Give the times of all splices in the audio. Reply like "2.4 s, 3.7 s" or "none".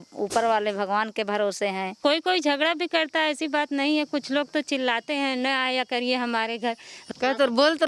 none